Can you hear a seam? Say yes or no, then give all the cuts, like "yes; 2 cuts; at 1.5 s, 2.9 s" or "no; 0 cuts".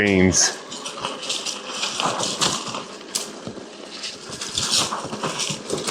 no; 0 cuts